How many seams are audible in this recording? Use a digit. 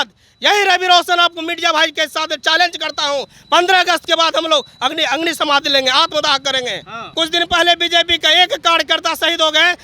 1